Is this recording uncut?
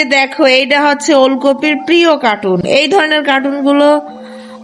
yes; 0 cuts

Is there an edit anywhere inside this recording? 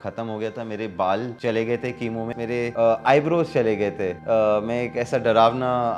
yes; 3 cuts; at 1.3 s, 2.4 s, 4.1 s

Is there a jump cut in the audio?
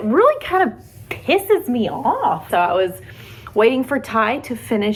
no; 0 cuts

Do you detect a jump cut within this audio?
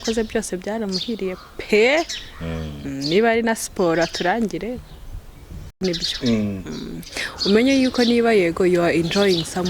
yes; 1 cut; at 5.8 s

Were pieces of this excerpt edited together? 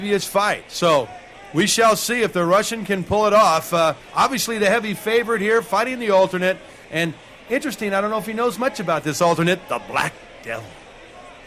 no; 0 cuts

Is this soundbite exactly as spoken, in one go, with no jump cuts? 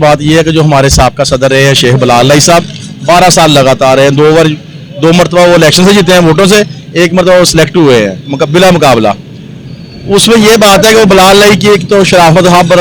yes; 0 cuts

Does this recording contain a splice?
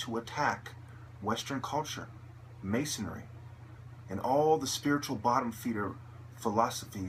yes; 1 cut; at 5.8 s

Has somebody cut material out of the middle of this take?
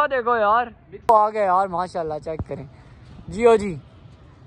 yes; 1 cut; at 1.1 s

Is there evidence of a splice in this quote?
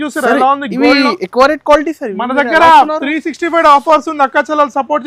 no; 0 cuts

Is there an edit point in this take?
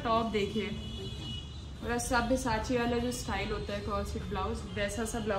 no; 0 cuts

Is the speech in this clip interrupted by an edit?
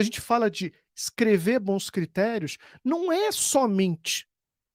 no; 0 cuts

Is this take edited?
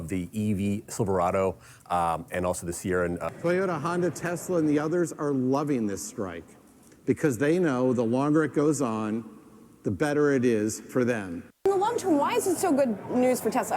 yes; 2 cuts; at 3.2 s, 11.6 s

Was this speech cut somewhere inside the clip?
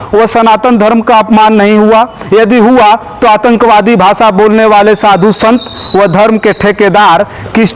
no; 0 cuts

